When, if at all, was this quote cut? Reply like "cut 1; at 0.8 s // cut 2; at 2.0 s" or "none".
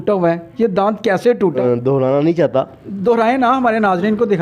cut 1; at 1.6 s